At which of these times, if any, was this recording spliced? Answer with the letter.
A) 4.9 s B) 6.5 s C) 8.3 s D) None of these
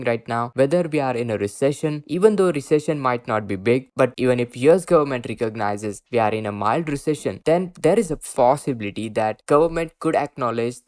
C